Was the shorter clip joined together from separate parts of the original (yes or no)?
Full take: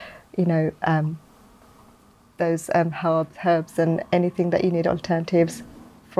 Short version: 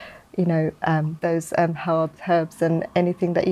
yes